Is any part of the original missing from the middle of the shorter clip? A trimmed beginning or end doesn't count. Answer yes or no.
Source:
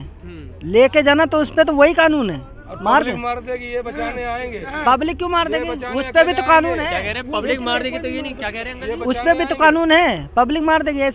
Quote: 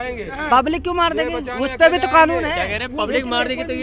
no